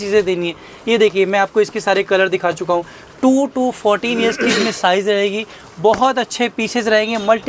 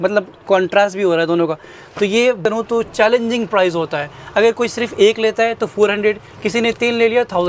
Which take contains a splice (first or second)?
second